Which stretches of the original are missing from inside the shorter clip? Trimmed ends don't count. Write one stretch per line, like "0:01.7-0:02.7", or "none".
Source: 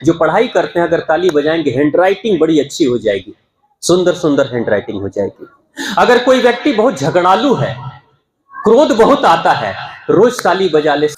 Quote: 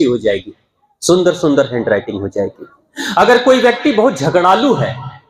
none